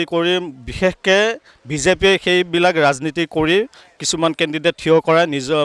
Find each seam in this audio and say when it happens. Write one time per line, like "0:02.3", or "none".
none